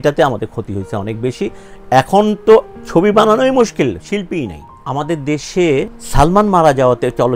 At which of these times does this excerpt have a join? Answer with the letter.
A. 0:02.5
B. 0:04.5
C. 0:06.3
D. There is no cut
B